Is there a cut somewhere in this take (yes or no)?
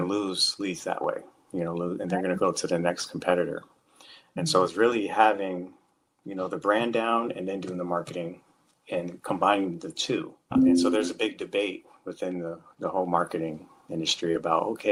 no